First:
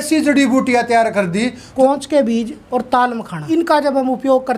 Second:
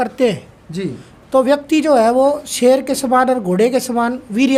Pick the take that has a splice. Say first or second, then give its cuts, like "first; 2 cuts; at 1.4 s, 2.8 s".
first; 3 cuts; at 1.7 s, 2.6 s, 3.4 s